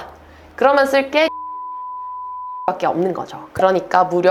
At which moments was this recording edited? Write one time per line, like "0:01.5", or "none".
none